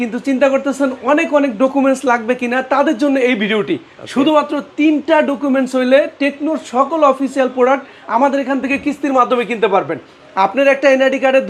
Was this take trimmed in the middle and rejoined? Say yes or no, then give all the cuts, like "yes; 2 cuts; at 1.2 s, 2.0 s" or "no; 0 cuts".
no; 0 cuts